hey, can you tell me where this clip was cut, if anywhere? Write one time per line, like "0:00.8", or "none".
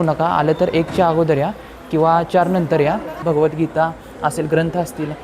0:03.1